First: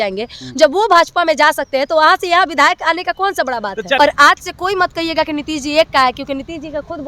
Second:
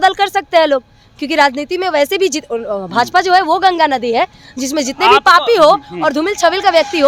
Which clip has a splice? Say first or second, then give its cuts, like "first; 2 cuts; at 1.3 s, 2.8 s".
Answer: first; 1 cut; at 4.0 s